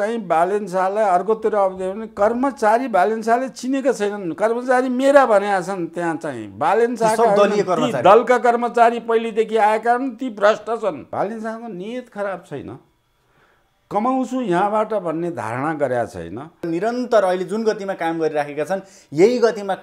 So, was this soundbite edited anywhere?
yes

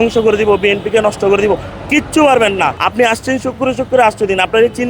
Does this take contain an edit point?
yes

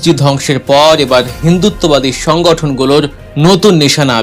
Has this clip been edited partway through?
yes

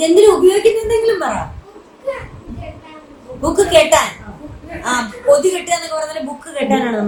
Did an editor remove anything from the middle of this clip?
no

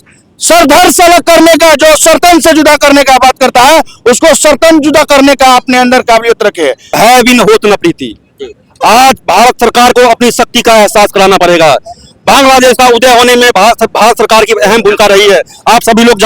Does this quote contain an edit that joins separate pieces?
yes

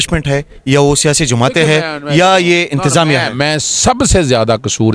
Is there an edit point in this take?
no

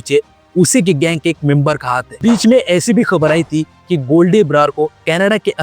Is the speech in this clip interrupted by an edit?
yes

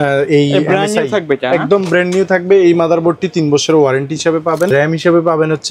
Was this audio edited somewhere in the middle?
yes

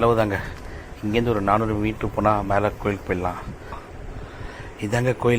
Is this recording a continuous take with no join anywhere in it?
no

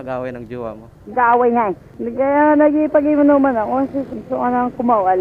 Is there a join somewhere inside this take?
yes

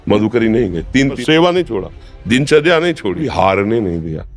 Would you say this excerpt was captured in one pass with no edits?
no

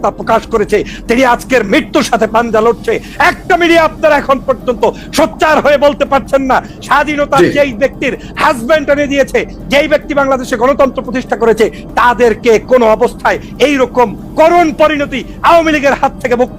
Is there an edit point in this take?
yes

